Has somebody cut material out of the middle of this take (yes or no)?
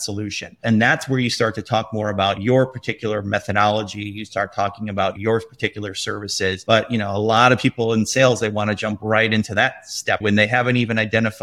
no